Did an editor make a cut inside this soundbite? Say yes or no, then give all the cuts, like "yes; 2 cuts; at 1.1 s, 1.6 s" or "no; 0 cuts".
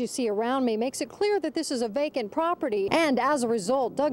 yes; 1 cut; at 2.9 s